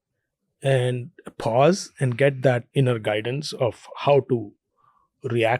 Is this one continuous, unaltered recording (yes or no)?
no